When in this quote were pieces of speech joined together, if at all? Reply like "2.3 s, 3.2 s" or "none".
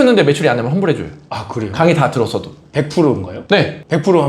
3.3 s